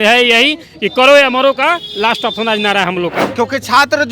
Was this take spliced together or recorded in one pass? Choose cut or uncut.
cut